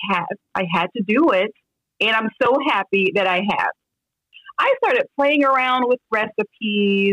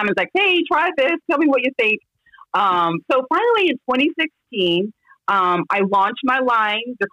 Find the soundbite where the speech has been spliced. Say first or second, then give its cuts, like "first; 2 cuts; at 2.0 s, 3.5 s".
first; 1 cut; at 4.2 s